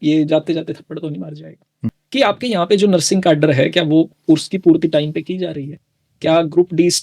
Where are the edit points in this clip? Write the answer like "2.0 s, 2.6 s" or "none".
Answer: 1.7 s, 4.2 s